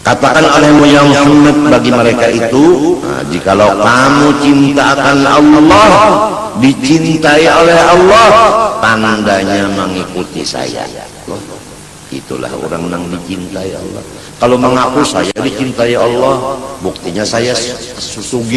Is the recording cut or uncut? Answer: cut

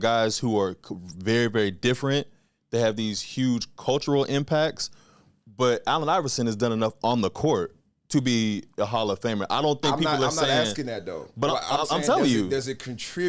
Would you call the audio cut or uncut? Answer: uncut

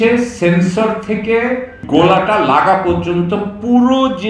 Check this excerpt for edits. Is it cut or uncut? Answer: cut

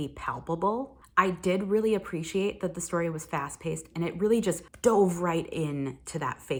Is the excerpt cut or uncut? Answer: uncut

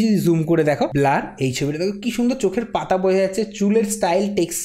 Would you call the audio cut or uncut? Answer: cut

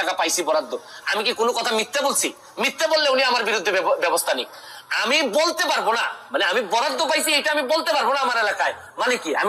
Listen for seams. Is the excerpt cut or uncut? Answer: uncut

